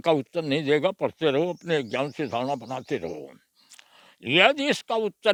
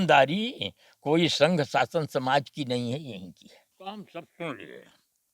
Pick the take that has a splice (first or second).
second